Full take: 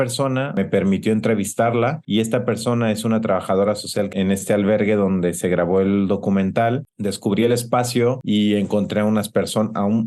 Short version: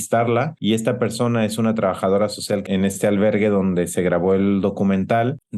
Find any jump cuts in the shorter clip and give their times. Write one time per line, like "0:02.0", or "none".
none